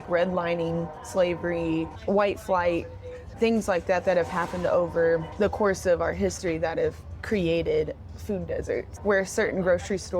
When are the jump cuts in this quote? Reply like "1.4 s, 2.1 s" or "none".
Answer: 1.9 s, 3.3 s, 5.3 s, 8.9 s